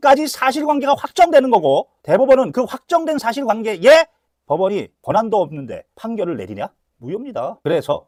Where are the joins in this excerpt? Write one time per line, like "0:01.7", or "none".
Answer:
none